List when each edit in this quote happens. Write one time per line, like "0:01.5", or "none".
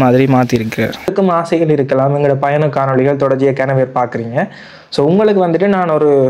0:01.1